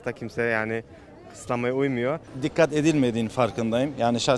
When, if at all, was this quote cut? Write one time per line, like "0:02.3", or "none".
0:02.3